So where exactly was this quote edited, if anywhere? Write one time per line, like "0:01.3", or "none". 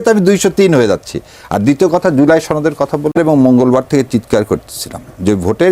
0:03.2